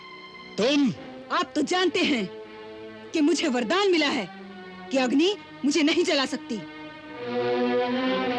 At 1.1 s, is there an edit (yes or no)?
yes